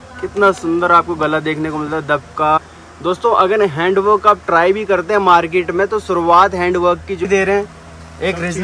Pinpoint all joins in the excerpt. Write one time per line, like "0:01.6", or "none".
0:02.8
0:07.3